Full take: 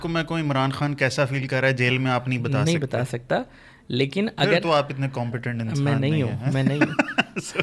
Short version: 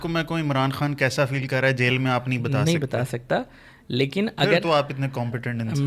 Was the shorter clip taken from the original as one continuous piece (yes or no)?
yes